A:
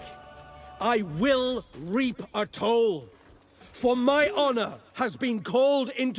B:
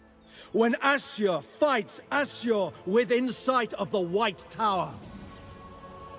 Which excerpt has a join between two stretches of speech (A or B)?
B